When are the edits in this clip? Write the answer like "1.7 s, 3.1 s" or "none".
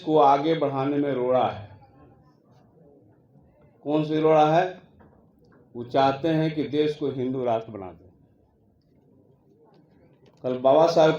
8.6 s